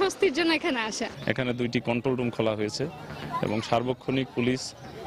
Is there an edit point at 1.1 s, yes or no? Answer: yes